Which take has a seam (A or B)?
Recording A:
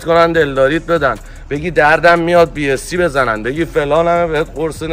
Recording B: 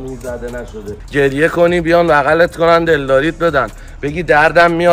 B